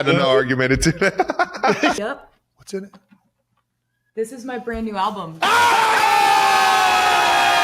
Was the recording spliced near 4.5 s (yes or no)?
no